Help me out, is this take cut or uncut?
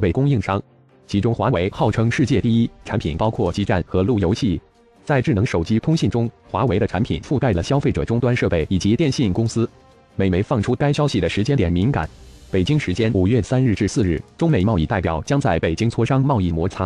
uncut